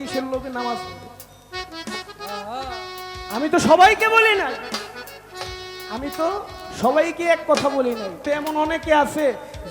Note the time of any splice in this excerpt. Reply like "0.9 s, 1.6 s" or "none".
8.2 s